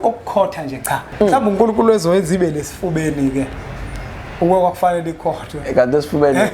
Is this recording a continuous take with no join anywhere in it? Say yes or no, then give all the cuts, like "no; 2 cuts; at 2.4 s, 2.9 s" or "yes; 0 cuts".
no; 1 cut; at 1.1 s